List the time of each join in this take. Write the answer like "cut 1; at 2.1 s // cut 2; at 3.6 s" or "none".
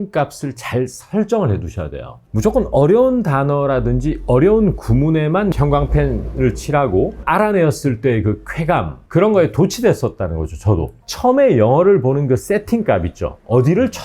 cut 1; at 2.2 s // cut 2; at 5.5 s // cut 3; at 7.2 s // cut 4; at 11.0 s